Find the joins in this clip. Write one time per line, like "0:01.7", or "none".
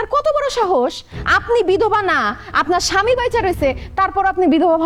none